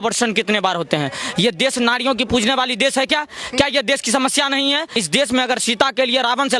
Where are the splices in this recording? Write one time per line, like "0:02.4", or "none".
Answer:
0:05.0